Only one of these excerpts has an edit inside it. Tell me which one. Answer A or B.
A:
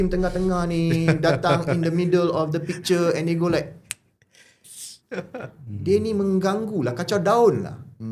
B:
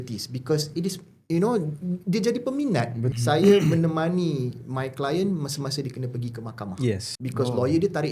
B